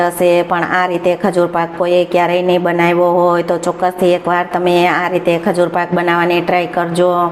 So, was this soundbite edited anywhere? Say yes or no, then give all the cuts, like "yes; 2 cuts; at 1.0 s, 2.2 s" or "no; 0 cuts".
no; 0 cuts